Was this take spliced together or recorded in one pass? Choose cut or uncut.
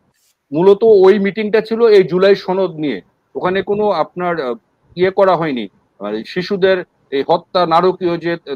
uncut